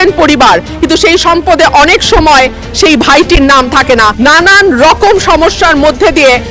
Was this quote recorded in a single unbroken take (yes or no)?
no